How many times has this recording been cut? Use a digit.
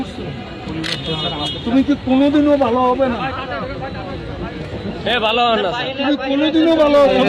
0